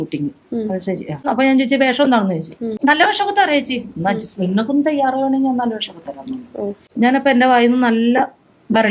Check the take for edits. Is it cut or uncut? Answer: uncut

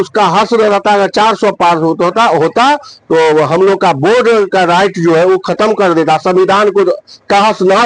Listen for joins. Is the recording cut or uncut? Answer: uncut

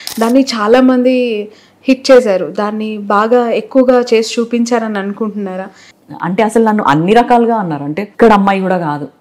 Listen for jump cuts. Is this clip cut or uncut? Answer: cut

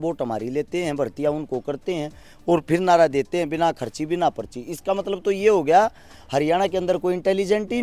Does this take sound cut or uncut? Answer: uncut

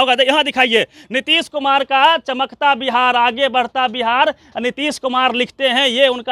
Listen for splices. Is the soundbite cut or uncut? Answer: uncut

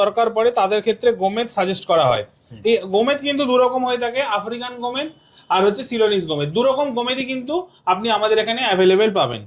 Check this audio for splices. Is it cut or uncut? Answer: uncut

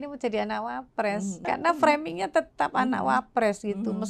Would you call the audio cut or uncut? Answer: cut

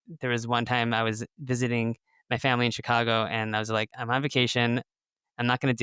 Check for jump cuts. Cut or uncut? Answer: cut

